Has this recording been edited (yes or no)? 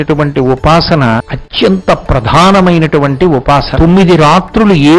yes